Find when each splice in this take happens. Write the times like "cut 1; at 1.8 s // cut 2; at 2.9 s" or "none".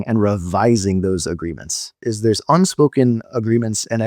cut 1; at 2.0 s